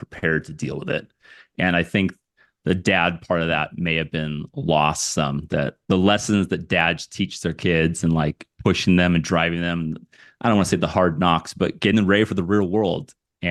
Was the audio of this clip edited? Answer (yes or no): no